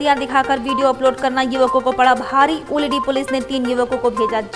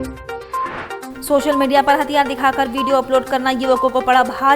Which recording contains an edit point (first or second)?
second